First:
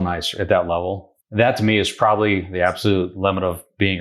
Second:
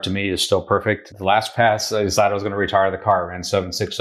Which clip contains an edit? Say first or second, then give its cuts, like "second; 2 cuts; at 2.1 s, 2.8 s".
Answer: second; 1 cut; at 1.1 s